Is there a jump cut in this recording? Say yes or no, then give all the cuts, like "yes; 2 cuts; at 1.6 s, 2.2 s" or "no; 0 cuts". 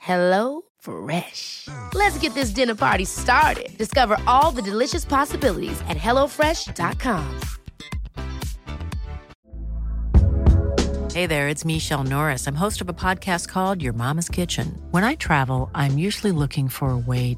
yes; 1 cut; at 9.4 s